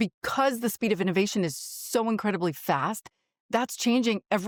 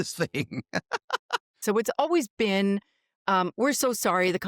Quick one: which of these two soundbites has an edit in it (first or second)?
second